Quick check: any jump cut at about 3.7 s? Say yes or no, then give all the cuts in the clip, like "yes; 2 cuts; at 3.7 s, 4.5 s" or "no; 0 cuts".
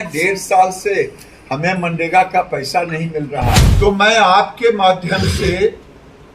yes; 1 cut; at 3.7 s